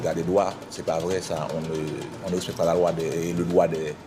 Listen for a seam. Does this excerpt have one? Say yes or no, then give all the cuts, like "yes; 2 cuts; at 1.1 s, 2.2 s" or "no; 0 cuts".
no; 0 cuts